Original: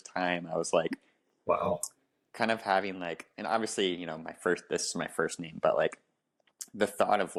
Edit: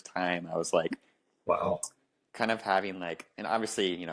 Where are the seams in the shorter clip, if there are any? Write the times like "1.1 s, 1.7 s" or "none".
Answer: none